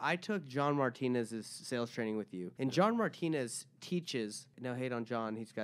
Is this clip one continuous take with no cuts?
no; 2 cuts; at 2.5 s, 4.5 s

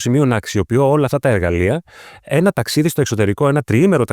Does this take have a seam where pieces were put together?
no; 0 cuts

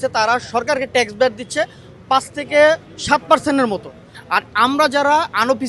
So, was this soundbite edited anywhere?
no; 0 cuts

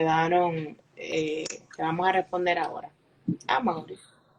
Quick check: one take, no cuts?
yes; 0 cuts

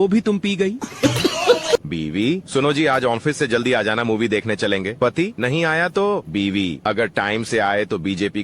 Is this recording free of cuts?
no; 1 cut; at 1.9 s

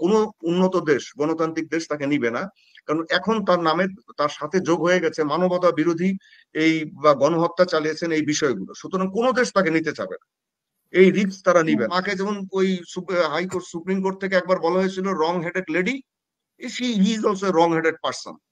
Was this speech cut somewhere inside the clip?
yes; 1 cut; at 12.0 s

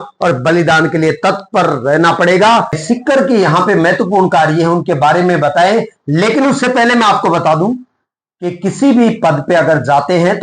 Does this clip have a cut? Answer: yes; 1 cut; at 2.8 s

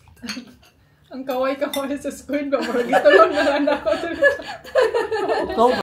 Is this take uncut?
yes; 0 cuts

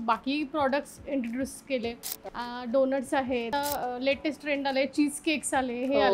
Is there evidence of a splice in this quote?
yes; 2 cuts; at 2.2 s, 3.5 s

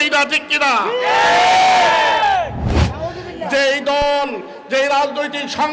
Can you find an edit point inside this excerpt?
yes; 1 cut; at 2.7 s

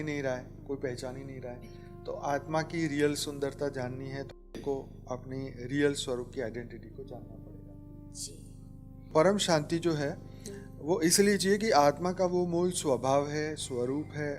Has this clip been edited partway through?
yes; 1 cut; at 9.1 s

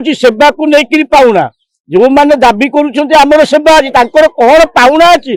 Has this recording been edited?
no; 0 cuts

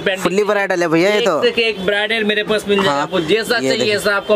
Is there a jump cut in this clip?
no; 0 cuts

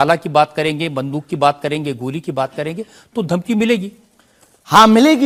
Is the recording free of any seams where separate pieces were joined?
yes; 0 cuts

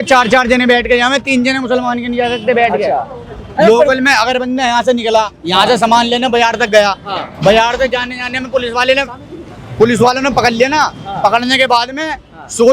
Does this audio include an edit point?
no; 0 cuts

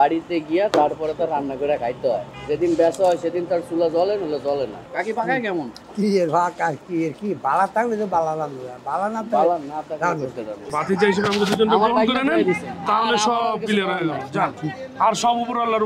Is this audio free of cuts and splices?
no; 4 cuts; at 2.3 s, 4.8 s, 5.8 s, 10.7 s

